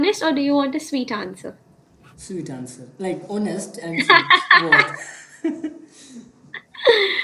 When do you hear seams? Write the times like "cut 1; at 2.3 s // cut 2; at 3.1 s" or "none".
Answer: none